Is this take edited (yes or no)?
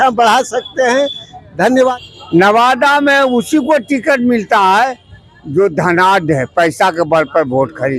yes